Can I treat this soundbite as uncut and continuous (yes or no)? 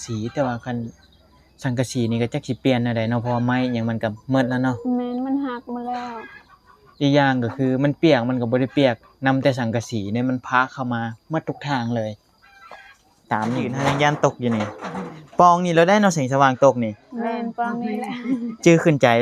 no